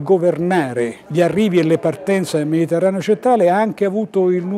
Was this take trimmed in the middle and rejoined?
yes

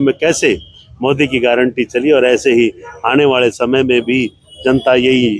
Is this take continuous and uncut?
yes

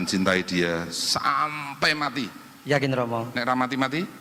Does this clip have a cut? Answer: no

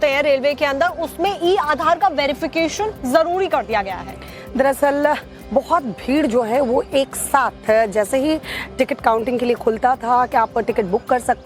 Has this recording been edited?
yes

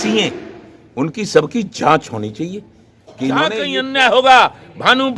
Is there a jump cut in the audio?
yes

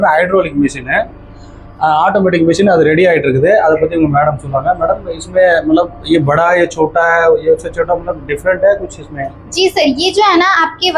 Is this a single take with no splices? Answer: yes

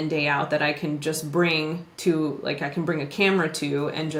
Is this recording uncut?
yes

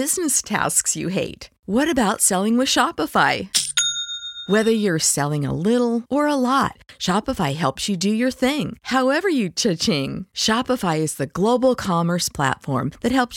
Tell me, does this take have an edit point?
no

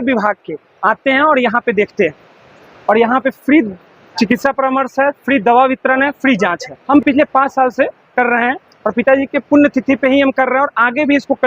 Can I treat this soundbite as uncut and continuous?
no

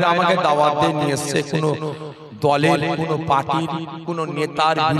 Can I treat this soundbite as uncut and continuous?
yes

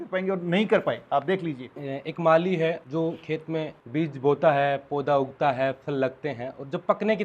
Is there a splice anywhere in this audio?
yes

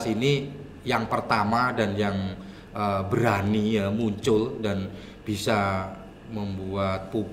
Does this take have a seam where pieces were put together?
no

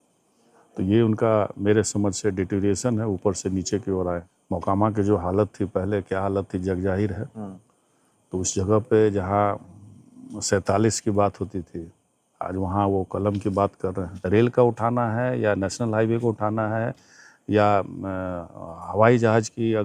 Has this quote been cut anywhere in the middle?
yes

